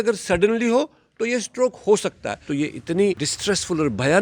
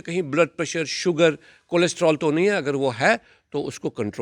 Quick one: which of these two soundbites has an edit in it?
first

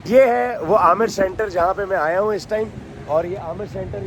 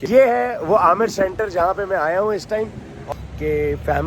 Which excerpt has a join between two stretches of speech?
second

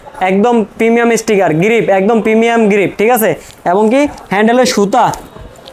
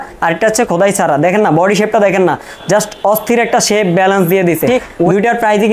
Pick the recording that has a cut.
second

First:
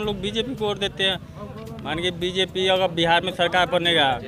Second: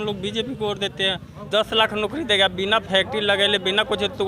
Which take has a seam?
second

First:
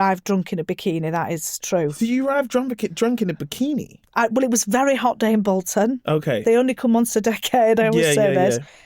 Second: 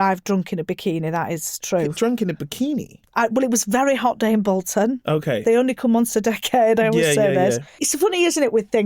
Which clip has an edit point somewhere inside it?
second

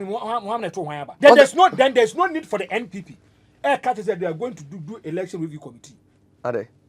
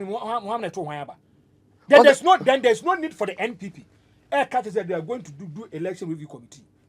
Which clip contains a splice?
first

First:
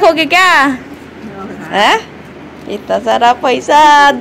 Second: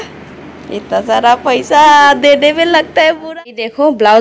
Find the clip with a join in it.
second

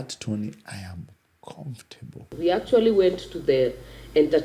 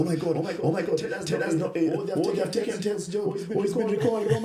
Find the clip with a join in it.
first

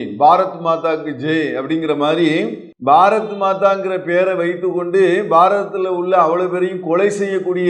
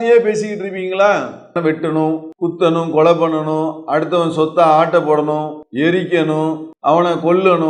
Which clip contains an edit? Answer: second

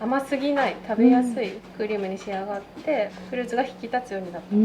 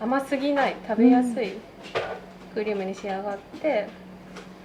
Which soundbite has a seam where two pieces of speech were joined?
first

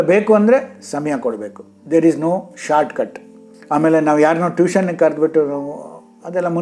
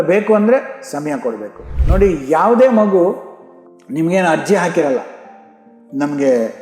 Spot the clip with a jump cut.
second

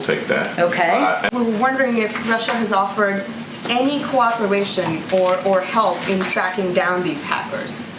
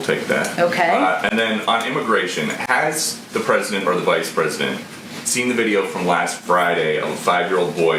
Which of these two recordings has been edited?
first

